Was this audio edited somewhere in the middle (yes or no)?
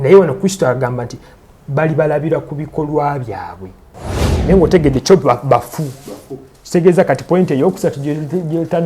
yes